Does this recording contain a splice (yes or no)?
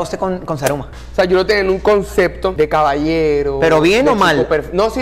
yes